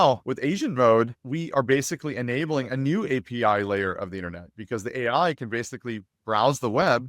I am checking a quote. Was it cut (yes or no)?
no